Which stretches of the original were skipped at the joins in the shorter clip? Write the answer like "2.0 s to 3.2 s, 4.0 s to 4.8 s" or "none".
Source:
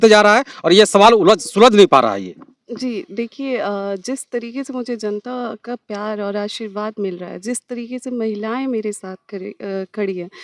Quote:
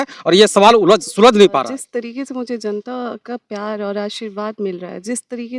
2.0 s to 4.0 s